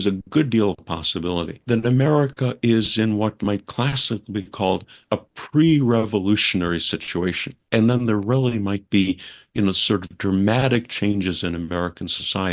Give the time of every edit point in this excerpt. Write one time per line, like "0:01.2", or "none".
0:01.6
0:07.6